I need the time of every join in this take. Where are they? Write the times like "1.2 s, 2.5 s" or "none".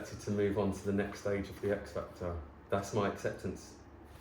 2.5 s